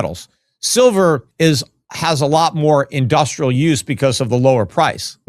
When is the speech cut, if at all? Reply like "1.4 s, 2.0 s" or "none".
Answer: 1.3 s